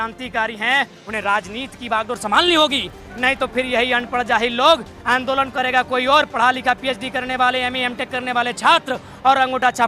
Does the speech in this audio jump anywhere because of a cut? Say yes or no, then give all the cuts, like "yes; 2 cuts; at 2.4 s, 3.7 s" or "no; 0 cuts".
no; 0 cuts